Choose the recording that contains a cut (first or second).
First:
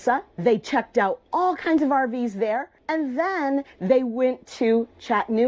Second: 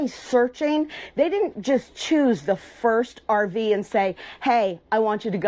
first